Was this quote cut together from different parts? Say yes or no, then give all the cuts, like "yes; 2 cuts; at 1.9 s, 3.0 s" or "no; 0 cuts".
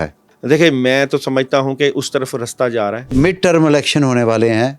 yes; 1 cut; at 3.1 s